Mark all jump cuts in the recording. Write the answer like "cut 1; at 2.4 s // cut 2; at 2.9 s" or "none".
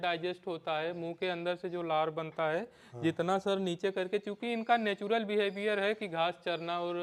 none